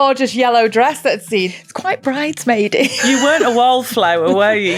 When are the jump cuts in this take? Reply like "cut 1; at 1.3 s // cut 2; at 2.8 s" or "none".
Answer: cut 1; at 1.5 s // cut 2; at 3.0 s